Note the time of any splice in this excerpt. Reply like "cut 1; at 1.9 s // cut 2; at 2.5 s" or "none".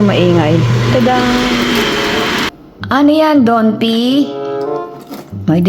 cut 1; at 2.5 s